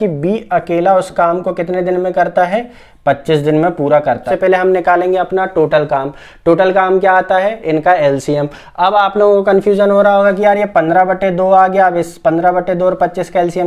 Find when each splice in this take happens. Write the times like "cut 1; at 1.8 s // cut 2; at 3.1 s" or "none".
cut 1; at 4.3 s